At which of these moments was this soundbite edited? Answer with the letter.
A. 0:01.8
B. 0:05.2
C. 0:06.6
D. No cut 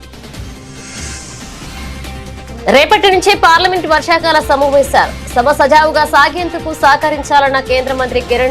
D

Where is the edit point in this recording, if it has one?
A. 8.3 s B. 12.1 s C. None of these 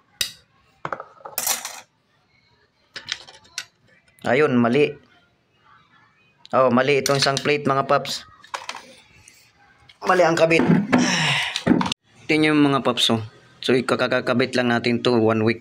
B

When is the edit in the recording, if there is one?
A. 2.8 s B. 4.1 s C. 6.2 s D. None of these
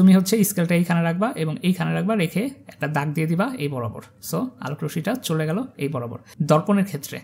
C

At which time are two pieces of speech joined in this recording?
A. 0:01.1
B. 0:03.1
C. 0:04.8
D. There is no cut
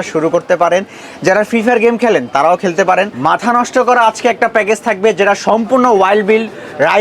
B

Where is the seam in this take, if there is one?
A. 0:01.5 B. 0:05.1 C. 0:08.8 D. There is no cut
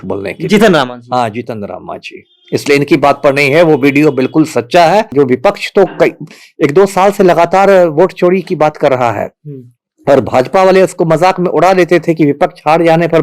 B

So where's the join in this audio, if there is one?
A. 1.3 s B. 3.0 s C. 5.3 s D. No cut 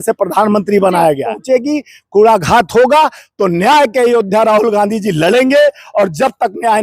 A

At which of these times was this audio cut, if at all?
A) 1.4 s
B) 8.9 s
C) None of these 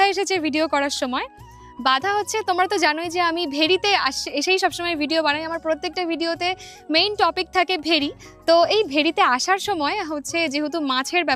C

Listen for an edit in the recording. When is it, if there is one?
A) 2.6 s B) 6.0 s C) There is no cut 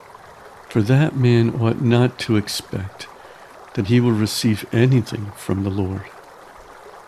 B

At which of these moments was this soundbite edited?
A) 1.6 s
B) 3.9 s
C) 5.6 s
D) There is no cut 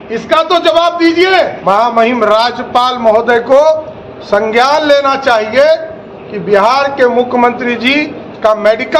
A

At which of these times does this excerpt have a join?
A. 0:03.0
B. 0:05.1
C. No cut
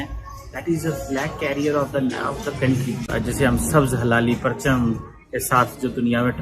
A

